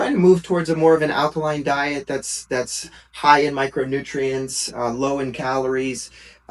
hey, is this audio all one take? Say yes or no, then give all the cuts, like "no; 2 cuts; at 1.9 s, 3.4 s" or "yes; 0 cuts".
yes; 0 cuts